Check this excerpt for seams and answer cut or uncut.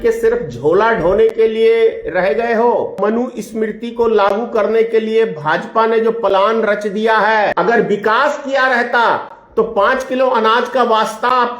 cut